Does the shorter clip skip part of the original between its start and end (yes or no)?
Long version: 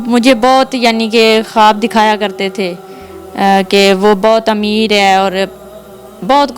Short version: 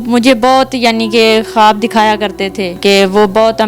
yes